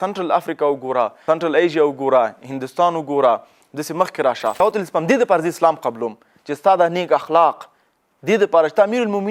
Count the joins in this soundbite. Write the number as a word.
two